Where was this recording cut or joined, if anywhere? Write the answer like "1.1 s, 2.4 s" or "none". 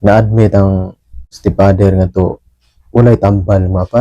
1.3 s